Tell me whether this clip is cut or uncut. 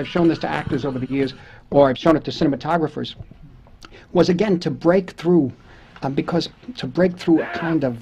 uncut